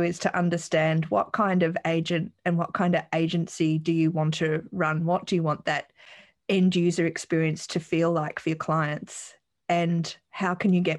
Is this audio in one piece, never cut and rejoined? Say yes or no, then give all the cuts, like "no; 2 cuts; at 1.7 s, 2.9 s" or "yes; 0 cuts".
yes; 0 cuts